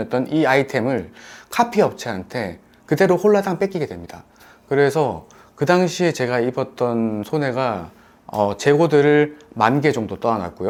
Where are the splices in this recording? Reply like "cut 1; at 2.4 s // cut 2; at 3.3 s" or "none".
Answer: none